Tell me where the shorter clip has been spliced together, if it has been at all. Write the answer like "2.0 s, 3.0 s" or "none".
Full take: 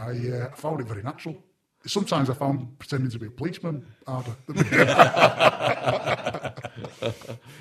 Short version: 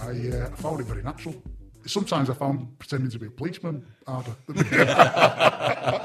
none